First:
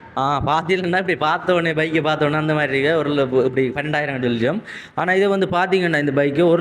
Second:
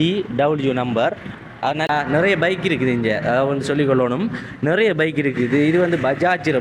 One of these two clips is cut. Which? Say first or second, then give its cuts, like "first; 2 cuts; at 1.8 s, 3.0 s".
second; 1 cut; at 1.9 s